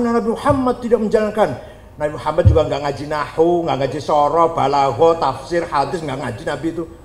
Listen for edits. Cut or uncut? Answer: uncut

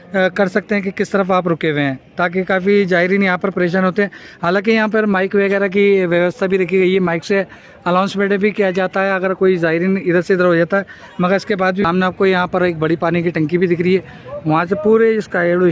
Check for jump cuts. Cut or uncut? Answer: cut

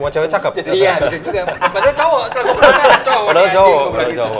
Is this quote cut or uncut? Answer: uncut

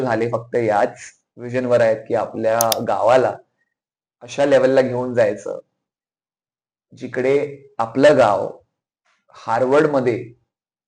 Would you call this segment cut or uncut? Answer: uncut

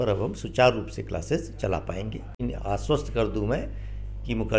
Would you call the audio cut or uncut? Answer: cut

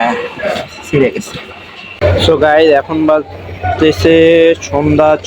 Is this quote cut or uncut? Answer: cut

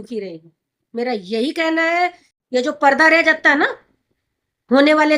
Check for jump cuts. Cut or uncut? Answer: cut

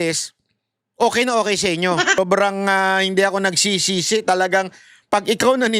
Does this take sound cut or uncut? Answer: cut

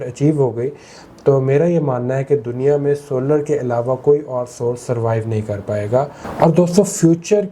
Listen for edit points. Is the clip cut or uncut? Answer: cut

